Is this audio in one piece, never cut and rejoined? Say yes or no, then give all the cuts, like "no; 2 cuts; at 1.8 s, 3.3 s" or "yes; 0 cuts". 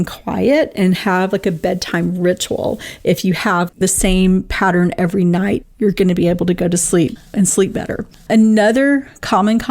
no; 2 cuts; at 3.7 s, 7.2 s